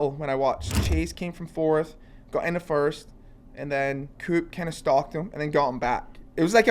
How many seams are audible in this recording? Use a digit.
1